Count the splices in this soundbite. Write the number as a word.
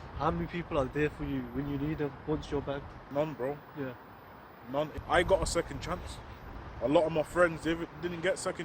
two